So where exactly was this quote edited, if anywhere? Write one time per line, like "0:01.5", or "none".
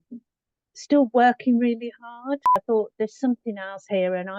0:02.6